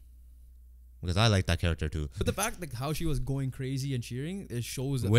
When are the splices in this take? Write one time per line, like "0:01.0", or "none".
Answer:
0:02.2